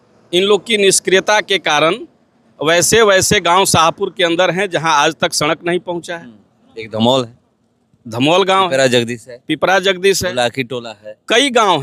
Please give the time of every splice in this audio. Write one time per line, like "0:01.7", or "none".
none